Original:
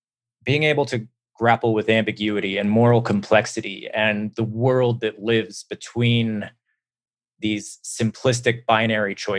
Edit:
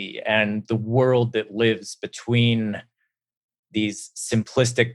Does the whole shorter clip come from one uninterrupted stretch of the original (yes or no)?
yes